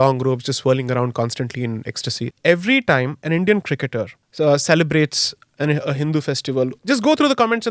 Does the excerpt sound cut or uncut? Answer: cut